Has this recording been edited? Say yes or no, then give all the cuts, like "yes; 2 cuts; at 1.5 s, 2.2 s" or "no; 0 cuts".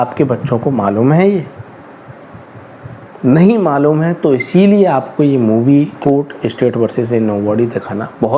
yes; 1 cut; at 5.9 s